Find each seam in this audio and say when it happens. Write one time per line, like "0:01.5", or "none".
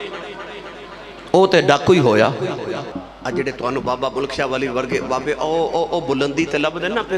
0:02.9